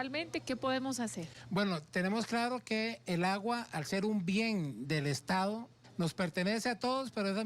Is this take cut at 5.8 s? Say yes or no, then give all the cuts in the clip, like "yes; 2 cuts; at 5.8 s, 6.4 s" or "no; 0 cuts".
yes; 1 cut; at 5.8 s